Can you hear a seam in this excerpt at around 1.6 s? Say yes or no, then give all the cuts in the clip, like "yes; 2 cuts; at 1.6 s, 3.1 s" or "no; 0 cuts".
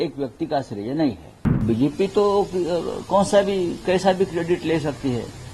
yes; 1 cut; at 1.6 s